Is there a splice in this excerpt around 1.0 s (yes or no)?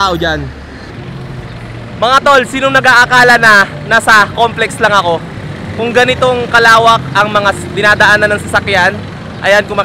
yes